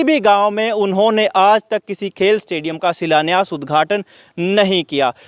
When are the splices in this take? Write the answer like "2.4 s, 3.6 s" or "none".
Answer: none